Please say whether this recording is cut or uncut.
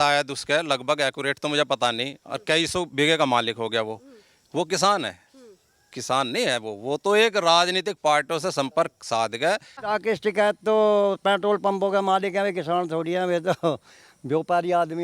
cut